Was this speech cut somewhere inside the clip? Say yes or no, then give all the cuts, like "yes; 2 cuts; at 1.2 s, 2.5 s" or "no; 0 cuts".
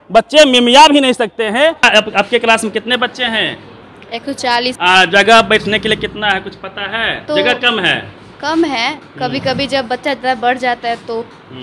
yes; 3 cuts; at 1.9 s, 4.8 s, 7.2 s